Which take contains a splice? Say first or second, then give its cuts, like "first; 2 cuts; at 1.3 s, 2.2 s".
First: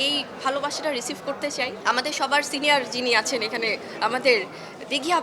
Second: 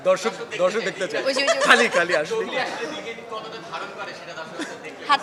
first; 1 cut; at 1.8 s